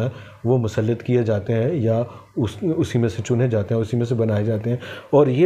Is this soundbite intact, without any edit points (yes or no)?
yes